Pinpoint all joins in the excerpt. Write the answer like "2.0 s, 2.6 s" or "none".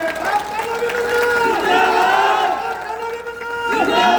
none